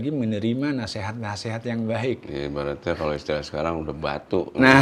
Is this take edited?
no; 0 cuts

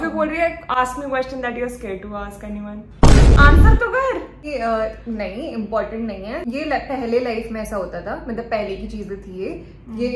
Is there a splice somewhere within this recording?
no; 0 cuts

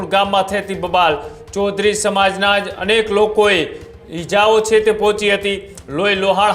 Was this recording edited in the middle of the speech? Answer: no; 0 cuts

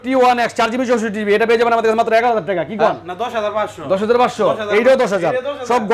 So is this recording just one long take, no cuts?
yes; 0 cuts

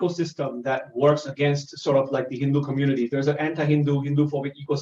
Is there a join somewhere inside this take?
no; 0 cuts

